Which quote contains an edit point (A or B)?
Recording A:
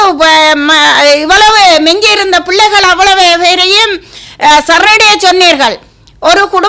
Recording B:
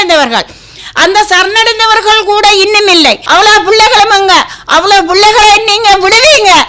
B